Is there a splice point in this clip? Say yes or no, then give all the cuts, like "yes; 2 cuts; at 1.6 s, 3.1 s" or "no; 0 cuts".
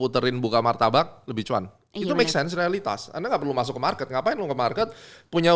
no; 0 cuts